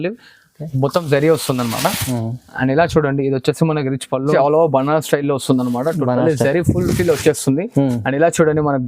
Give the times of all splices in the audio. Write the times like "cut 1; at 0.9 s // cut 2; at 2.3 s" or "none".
cut 1; at 4.3 s